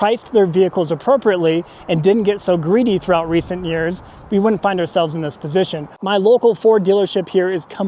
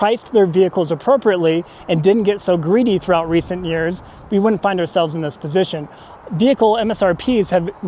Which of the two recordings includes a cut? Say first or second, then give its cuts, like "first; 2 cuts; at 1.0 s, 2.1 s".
first; 1 cut; at 6.0 s